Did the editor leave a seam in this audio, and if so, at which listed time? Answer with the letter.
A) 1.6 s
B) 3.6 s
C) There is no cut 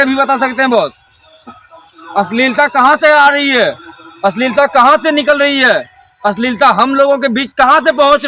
A